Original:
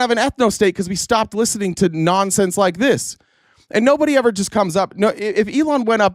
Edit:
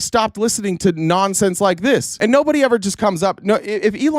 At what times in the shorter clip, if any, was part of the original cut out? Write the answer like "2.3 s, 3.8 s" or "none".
2.1 s

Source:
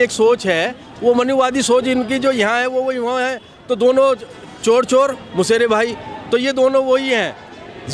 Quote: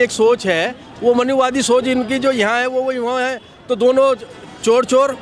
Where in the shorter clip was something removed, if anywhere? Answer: none

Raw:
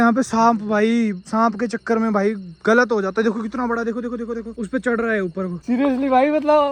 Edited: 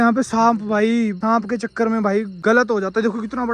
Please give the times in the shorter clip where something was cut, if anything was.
1.2 s, 2.3 s

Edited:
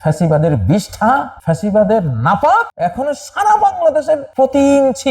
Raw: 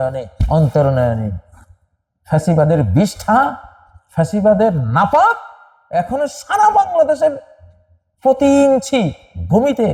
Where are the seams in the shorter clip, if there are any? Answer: 1.3 s, 2.7 s, 4.3 s

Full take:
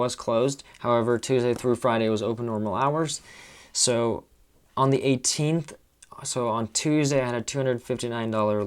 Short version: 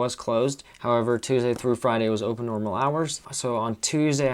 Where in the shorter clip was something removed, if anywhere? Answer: 3.3 s

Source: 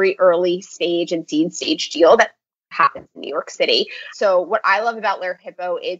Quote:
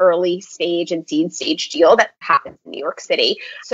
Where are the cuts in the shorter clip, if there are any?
2.2 s

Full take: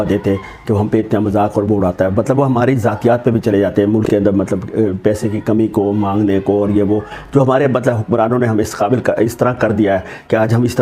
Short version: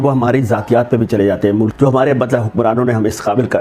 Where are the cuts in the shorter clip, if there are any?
1.7 s

